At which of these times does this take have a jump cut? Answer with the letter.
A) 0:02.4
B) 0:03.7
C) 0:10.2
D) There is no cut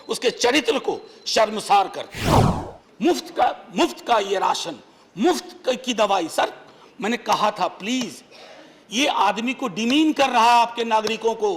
A